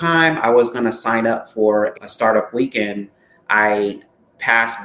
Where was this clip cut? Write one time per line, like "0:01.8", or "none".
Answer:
0:01.9